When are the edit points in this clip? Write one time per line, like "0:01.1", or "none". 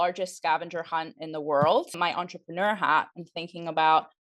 0:02.0